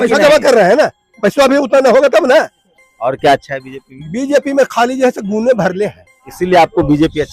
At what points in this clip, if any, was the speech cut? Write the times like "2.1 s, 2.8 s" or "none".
2.6 s, 6.2 s